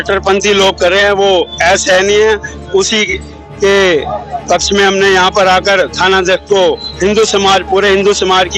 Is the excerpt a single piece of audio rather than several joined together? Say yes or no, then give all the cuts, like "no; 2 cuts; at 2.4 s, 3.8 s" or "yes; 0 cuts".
yes; 0 cuts